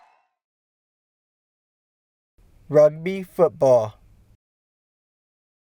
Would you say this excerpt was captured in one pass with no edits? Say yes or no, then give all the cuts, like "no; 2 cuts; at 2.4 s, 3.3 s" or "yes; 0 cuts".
yes; 0 cuts